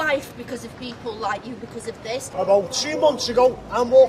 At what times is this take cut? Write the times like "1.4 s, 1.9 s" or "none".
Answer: 2.3 s